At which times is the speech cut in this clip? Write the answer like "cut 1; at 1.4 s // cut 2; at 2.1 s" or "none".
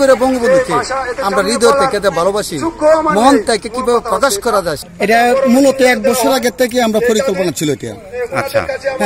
cut 1; at 4.8 s